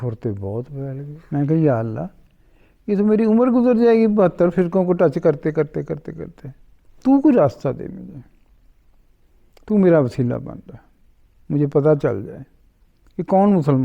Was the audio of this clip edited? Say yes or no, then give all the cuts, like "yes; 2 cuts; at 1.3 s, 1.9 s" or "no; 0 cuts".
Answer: yes; 1 cut; at 1.1 s